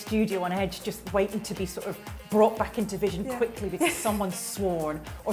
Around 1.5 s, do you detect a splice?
no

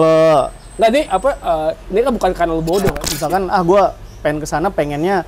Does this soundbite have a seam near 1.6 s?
no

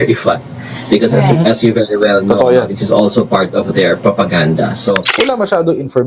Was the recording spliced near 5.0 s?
yes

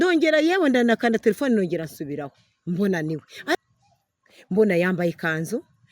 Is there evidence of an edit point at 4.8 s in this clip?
no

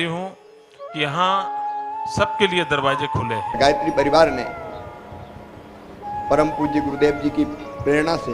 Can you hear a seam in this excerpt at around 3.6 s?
yes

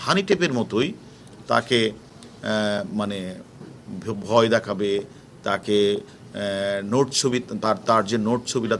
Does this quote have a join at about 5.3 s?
no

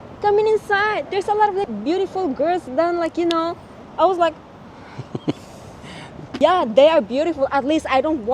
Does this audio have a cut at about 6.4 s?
yes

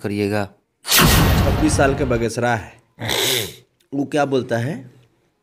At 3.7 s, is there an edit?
no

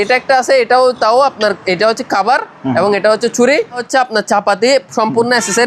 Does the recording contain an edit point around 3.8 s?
yes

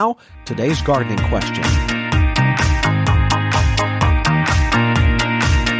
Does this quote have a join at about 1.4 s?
yes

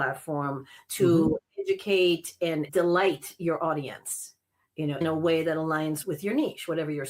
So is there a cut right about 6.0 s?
yes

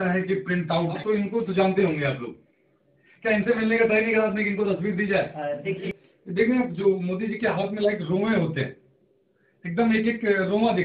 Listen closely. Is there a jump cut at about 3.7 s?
no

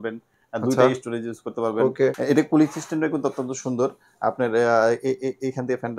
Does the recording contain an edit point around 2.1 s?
no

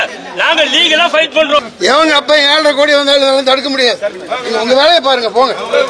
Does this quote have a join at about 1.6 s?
yes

